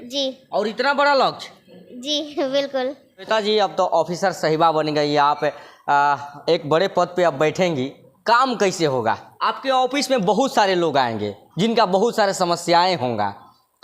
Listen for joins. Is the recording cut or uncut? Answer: cut